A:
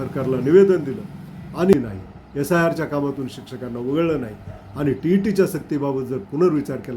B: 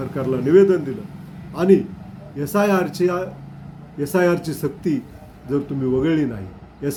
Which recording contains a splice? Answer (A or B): A